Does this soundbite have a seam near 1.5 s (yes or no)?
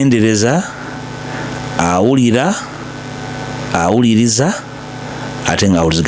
no